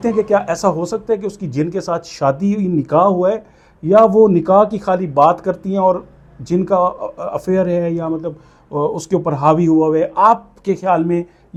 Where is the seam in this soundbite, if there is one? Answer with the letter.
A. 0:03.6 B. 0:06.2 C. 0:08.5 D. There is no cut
D